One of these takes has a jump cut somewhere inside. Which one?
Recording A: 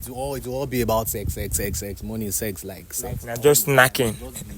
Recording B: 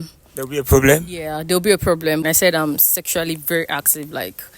B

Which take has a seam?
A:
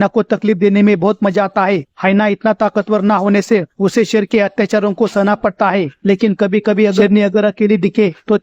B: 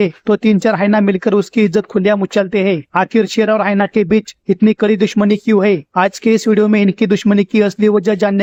A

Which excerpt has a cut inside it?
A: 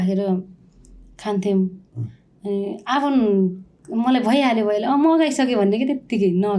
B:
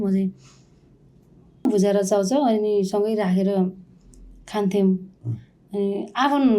B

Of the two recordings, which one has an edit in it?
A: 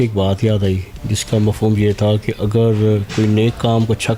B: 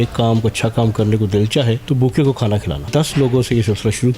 B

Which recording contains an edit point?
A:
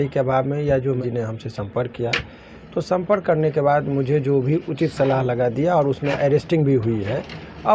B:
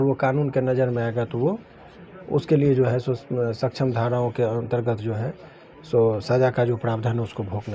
A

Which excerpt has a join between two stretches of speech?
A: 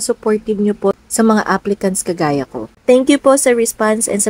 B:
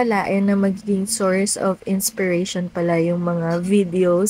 A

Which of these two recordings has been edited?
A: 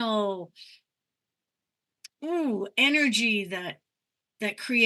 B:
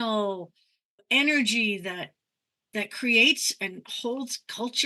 B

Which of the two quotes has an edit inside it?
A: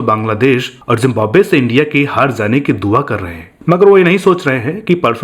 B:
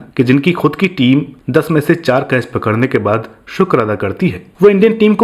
A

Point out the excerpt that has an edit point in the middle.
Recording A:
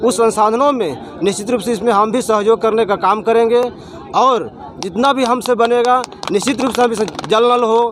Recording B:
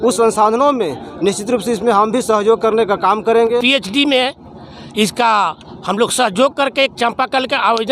B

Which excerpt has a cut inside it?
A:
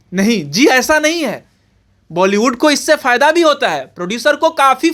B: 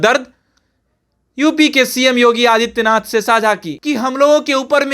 B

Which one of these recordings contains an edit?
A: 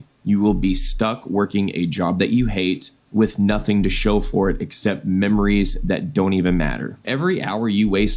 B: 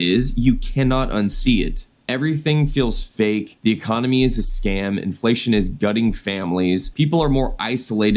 A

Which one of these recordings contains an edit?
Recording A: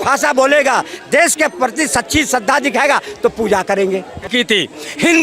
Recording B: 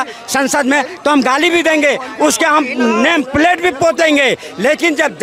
A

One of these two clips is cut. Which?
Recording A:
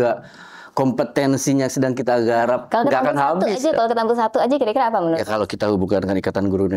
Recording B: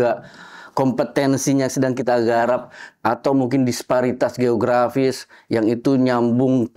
A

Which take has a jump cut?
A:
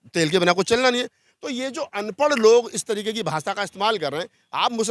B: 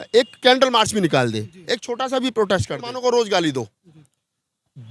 B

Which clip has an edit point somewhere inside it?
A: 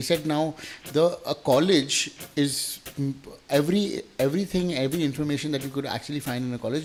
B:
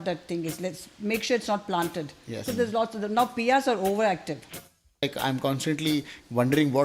B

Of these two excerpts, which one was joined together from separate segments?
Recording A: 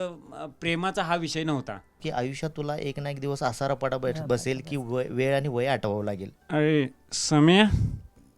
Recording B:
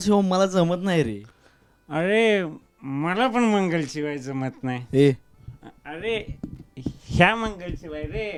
A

